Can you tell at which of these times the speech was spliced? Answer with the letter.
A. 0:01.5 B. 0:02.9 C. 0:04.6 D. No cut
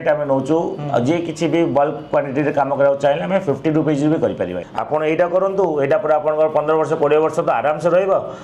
C